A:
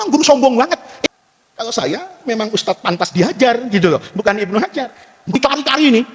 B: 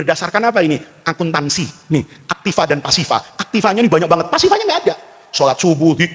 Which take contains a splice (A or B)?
A